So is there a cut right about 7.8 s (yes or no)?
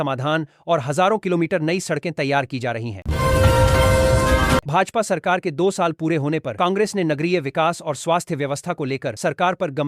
no